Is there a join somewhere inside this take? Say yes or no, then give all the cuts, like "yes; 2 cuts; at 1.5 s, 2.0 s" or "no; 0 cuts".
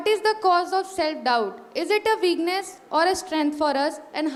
no; 0 cuts